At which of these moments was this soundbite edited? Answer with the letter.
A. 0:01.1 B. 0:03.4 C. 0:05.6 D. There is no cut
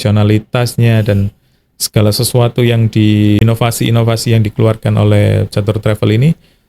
B